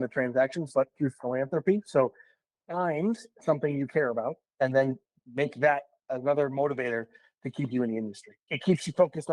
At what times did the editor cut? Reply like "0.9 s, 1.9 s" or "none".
8.4 s